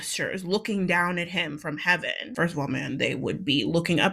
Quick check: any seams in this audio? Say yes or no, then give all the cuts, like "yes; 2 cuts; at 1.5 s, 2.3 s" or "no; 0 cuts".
no; 0 cuts